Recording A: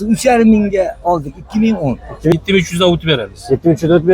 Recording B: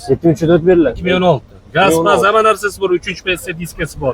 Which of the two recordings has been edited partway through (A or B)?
A